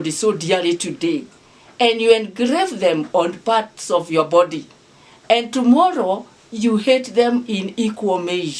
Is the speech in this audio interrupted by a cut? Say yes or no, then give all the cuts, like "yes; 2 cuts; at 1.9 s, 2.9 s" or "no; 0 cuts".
no; 0 cuts